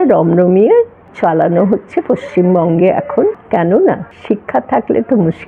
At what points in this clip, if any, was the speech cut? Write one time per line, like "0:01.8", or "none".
0:01.0
0:03.4
0:04.1